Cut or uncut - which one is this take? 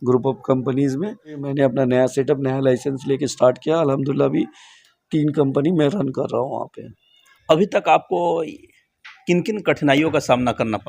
cut